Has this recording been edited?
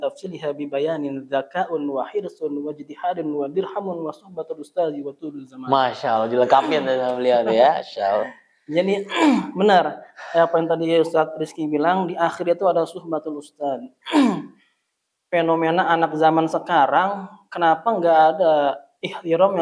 no; 0 cuts

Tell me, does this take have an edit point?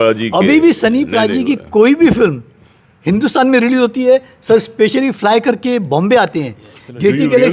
no; 0 cuts

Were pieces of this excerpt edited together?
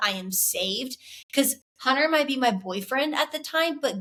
no; 0 cuts

